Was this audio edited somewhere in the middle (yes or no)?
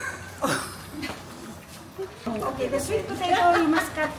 yes